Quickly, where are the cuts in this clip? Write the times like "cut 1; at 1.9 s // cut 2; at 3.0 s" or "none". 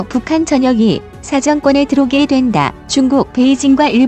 cut 1; at 2.8 s